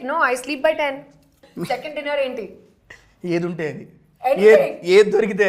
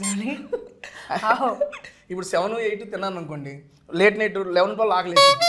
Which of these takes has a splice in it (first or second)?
first